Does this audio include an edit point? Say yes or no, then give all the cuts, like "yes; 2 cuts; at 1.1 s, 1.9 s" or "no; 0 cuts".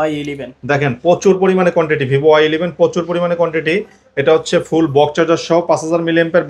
no; 0 cuts